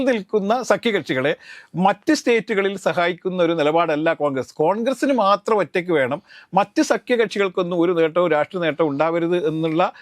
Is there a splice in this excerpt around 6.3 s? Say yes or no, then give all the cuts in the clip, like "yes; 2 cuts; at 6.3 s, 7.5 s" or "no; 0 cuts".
no; 0 cuts